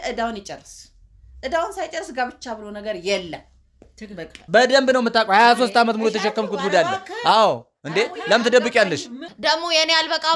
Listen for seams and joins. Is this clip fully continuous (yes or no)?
no